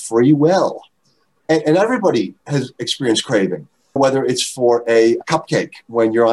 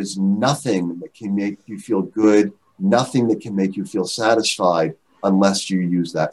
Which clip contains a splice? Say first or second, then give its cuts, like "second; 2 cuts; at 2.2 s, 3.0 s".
first; 2 cuts; at 1.4 s, 5.2 s